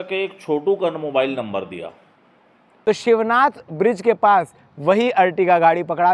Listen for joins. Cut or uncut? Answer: cut